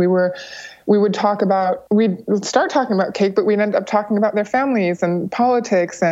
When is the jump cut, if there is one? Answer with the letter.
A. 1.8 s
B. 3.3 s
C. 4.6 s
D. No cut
A